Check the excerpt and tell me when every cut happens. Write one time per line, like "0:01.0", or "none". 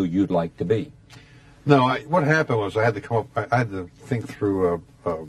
none

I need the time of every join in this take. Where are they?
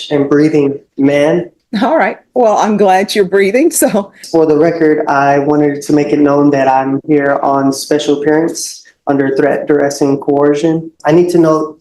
0:01.6
0:04.2
0:10.9

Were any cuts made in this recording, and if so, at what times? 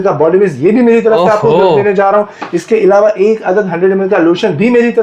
none

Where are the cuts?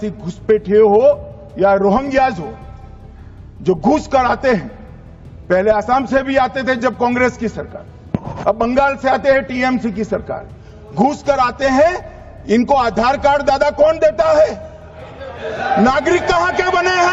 none

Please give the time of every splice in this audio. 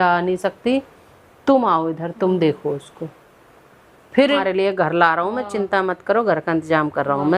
0:04.4

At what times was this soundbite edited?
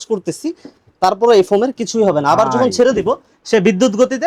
none

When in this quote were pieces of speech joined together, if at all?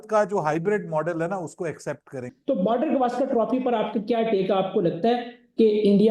0:02.3

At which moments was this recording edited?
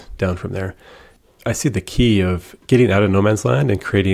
0:01.1
0:02.5

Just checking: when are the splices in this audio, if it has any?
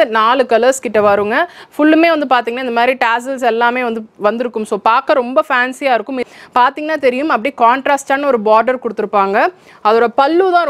0:06.2

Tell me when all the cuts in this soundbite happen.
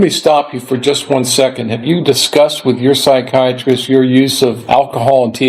0:04.6

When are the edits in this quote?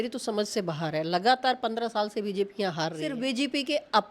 0:03.1

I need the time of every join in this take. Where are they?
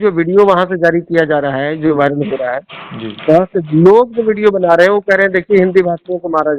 none

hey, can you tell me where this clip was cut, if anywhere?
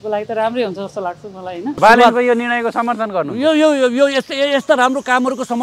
0:01.8

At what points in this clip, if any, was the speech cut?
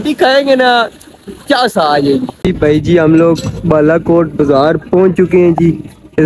none

